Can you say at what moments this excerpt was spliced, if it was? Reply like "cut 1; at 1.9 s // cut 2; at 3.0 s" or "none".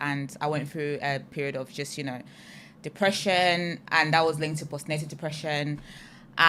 none